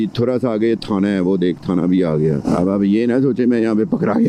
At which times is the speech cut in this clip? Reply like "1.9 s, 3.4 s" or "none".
2.5 s